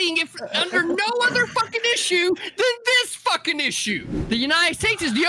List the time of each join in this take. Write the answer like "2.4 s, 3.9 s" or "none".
4.1 s